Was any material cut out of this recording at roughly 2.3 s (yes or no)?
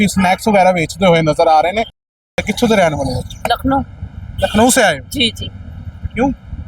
yes